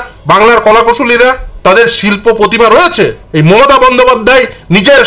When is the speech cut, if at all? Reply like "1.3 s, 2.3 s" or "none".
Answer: 1.5 s, 3.2 s